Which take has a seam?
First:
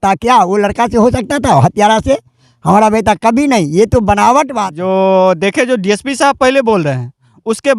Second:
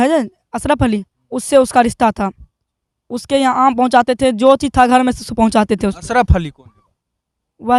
first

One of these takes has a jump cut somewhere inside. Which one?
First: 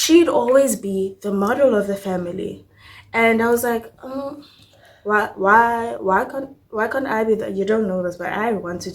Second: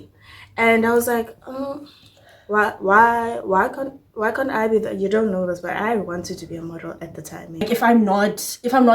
second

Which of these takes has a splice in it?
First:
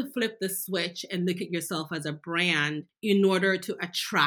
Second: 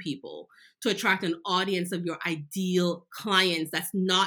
first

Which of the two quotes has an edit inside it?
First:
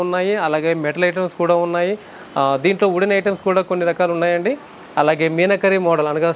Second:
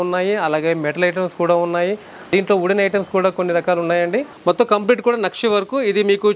second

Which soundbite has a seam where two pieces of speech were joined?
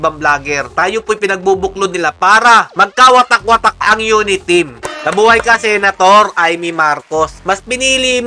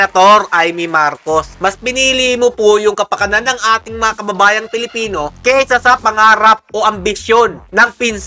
first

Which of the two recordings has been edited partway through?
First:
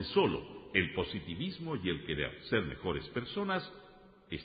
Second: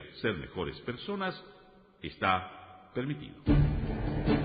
second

